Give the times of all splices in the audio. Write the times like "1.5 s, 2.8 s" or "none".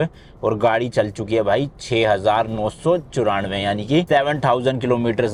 none